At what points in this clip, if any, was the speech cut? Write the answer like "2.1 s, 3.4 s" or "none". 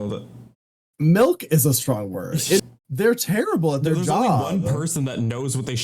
2.6 s